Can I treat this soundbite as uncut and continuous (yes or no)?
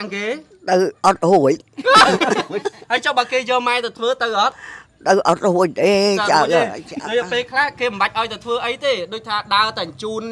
yes